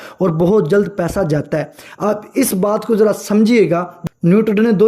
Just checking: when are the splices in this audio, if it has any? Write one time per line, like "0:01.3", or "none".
0:03.9